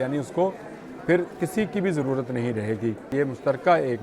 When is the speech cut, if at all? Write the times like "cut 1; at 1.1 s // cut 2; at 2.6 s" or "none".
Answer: cut 1; at 3.1 s